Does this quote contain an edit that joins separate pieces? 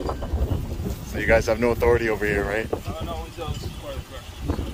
no; 0 cuts

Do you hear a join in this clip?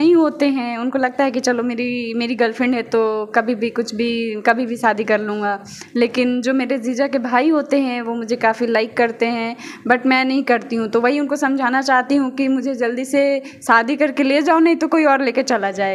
no; 0 cuts

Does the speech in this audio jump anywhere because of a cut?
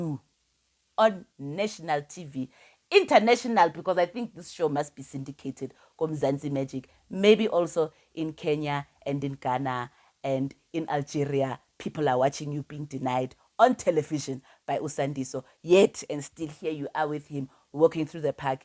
no; 0 cuts

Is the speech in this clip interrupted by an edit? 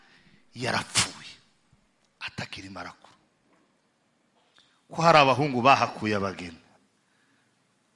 yes; 1 cut; at 4.6 s

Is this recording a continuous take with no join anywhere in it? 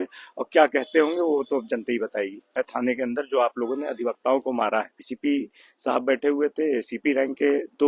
no; 2 cuts; at 2.6 s, 5.1 s

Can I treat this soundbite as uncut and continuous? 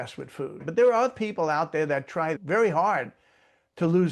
yes; 0 cuts

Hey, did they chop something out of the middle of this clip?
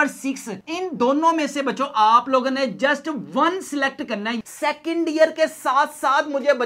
yes; 1 cut; at 4.4 s

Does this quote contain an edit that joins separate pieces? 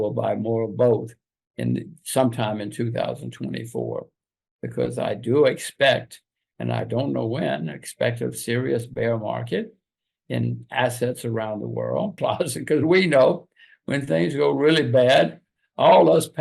yes; 1 cut; at 12.2 s

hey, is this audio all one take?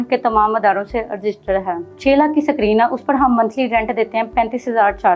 no; 1 cut; at 1.9 s

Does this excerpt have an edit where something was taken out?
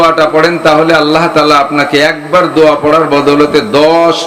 no; 0 cuts

